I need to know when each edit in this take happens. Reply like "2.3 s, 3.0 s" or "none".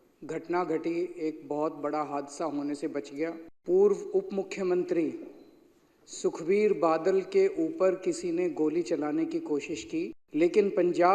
3.5 s, 10.2 s